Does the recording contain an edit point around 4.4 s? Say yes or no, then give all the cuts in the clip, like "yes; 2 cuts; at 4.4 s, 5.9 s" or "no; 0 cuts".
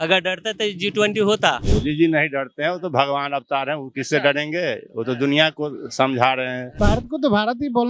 no; 2 cuts; at 1.6 s, 6.6 s